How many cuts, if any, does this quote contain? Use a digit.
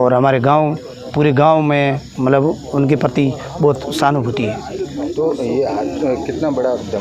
0